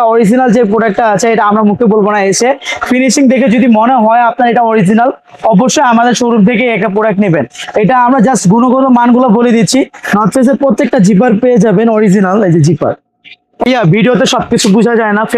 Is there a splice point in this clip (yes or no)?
yes